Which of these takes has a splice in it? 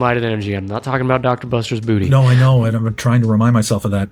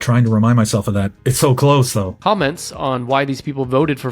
second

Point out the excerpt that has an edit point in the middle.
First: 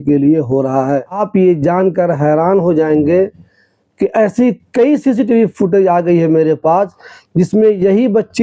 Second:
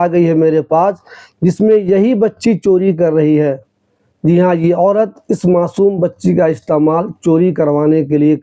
first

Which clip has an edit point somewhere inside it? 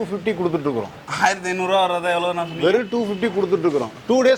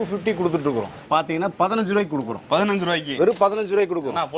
second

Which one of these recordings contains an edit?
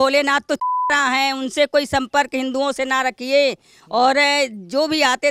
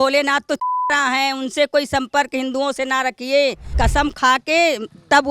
second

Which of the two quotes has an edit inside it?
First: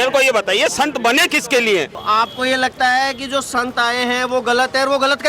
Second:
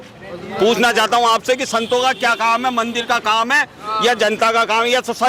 first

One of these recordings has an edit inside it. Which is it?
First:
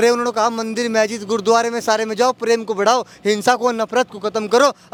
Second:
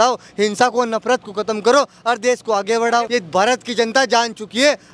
second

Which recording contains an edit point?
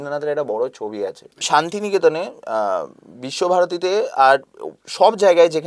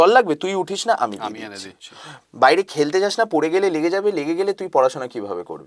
first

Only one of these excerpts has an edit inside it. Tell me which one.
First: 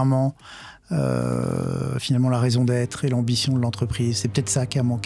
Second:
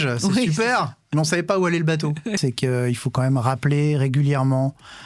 second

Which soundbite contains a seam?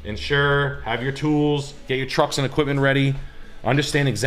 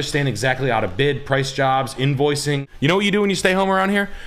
second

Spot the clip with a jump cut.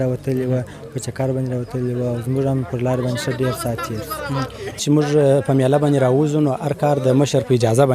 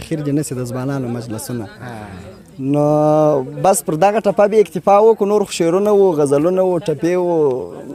first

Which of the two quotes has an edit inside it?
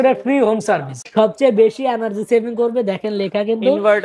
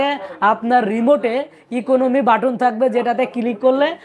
first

